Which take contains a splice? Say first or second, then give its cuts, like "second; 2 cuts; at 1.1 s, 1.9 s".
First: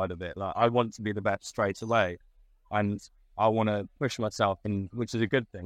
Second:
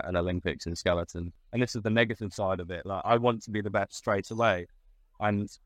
second; 1 cut; at 1.4 s